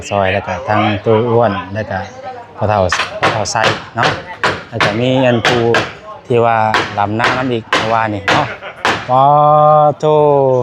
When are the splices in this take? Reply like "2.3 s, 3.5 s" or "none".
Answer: none